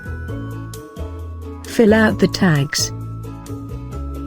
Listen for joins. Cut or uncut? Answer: cut